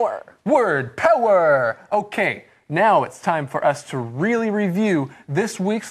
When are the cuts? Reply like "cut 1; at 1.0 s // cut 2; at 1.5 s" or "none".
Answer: cut 1; at 2.0 s